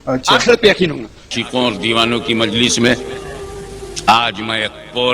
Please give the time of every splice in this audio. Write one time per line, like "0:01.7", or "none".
0:01.3

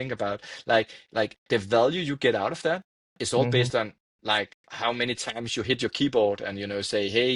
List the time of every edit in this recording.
0:01.4

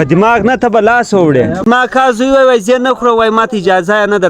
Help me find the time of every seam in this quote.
0:01.6

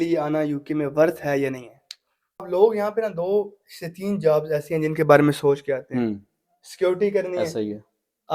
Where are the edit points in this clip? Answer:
0:02.5

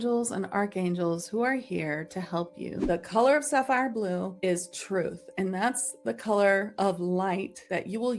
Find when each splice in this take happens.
0:02.8

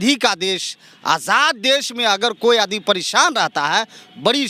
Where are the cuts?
none

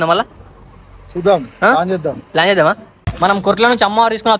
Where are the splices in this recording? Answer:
0:03.0

